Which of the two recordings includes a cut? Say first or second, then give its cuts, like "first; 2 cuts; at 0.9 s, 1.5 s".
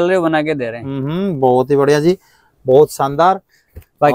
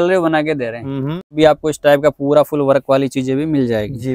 second; 1 cut; at 1.3 s